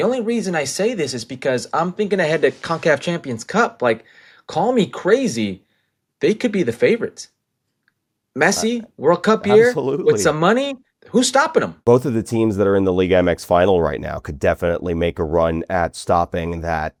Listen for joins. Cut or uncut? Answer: uncut